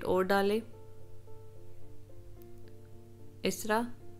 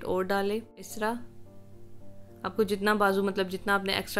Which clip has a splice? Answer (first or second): second